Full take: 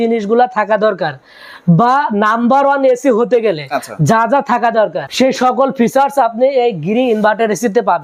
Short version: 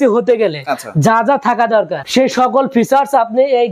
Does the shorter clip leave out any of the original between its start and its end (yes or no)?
no